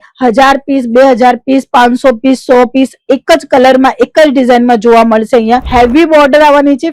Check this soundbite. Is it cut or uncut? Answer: cut